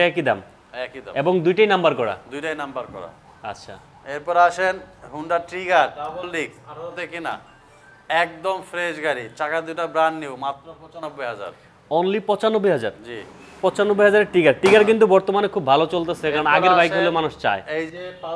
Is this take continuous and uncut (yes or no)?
yes